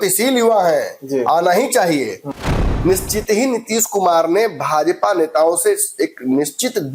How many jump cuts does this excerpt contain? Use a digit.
1